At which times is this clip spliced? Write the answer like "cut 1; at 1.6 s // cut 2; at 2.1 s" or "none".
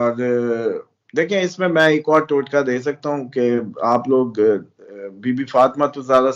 none